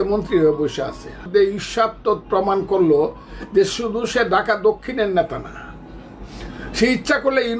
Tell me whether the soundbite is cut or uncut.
cut